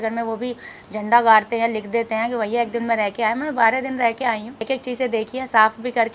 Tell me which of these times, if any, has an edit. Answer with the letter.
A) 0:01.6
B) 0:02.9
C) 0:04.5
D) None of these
C